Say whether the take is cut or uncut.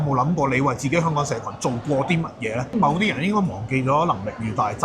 cut